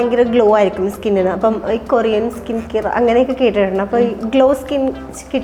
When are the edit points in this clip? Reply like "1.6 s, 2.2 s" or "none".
none